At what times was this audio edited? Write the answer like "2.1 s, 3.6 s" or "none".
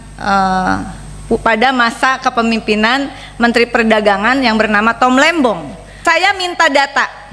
5.9 s